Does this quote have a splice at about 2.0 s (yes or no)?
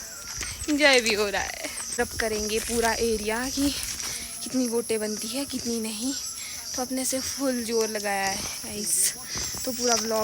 yes